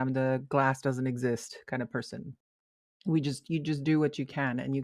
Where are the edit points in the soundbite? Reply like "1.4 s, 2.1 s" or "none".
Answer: 2.4 s

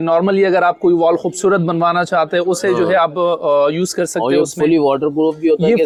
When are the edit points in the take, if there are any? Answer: none

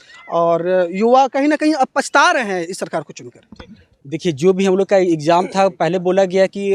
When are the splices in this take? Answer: none

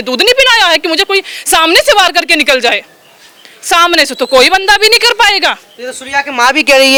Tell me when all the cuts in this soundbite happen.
none

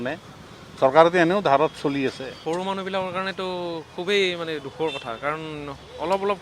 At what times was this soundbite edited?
2.3 s

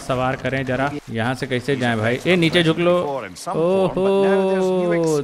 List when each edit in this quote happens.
1.0 s

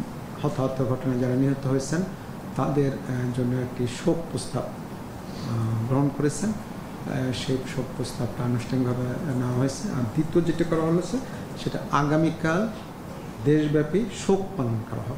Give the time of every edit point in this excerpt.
none

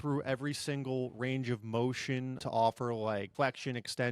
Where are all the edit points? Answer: 2.4 s, 3.3 s

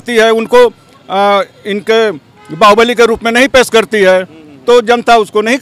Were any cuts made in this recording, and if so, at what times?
none

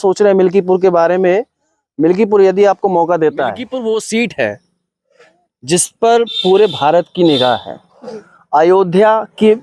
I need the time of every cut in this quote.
3.7 s

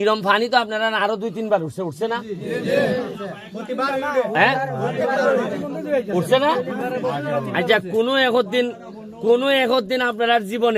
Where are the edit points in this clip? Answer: none

